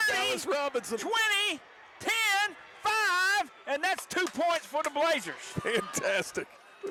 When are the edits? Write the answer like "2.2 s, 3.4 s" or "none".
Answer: none